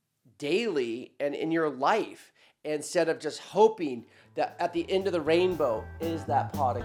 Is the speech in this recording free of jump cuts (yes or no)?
yes